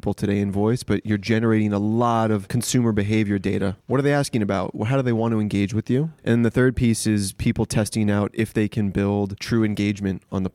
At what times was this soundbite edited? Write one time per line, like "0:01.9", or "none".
0:02.5
0:03.8
0:06.1
0:09.4